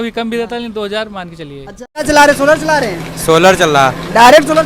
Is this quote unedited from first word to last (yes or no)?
no